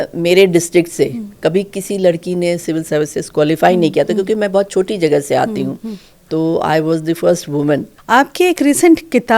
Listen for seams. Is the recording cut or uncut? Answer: cut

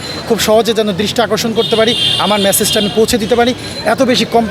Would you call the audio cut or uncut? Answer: uncut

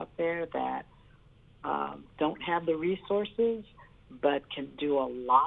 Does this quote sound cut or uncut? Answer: uncut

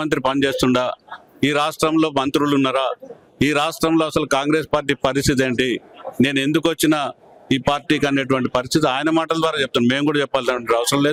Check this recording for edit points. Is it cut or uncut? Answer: uncut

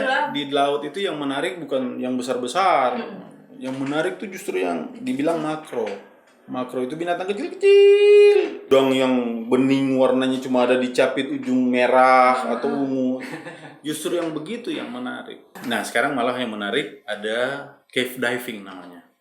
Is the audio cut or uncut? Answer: cut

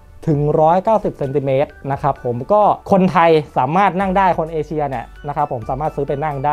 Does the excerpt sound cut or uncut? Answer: uncut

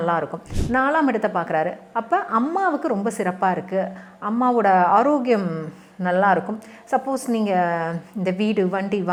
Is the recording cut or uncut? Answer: uncut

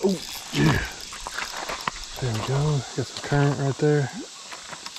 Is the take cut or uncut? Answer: uncut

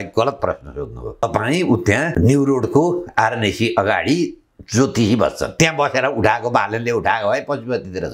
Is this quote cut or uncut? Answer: cut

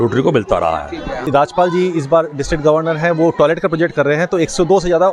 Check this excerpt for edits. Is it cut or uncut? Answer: cut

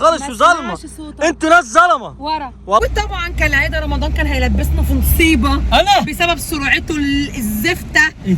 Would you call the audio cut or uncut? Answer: cut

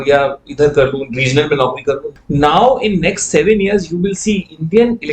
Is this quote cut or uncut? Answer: cut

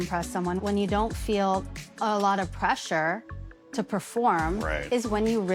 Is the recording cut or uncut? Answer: uncut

